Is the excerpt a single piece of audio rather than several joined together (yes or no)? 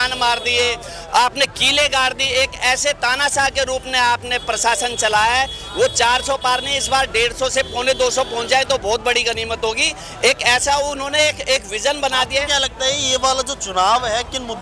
yes